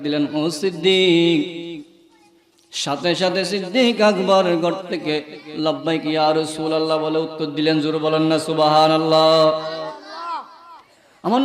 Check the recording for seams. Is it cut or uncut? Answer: uncut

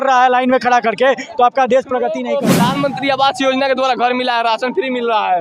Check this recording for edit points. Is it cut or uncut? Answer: cut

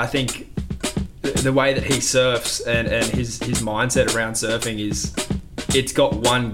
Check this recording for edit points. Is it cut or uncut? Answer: uncut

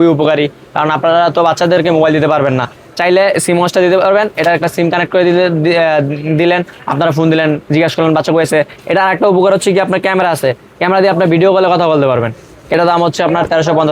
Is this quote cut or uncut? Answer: cut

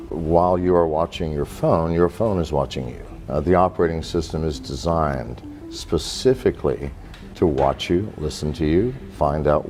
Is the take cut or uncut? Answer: uncut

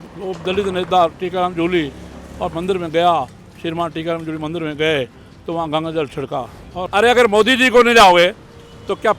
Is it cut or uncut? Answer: cut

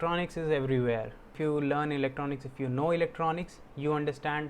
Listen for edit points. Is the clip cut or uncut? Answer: cut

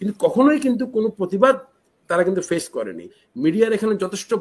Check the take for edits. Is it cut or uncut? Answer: cut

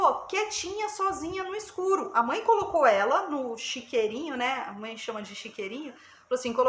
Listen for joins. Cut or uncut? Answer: uncut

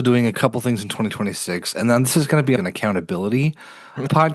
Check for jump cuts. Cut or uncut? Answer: uncut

